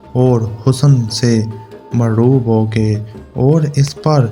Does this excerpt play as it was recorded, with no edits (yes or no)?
yes